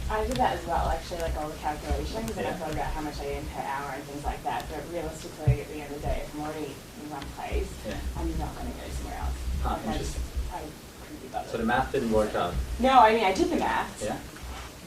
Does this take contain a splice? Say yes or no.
yes